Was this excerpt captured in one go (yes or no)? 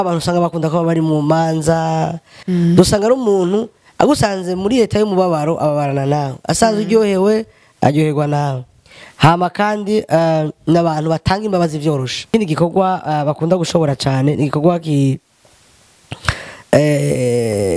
no